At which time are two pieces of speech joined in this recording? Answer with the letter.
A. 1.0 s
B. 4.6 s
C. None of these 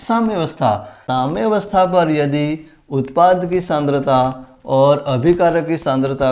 A